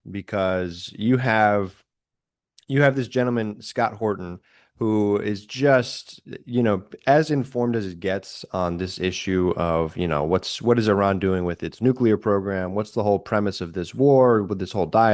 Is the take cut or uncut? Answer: uncut